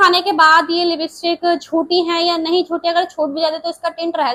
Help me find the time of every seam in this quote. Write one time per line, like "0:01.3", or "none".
none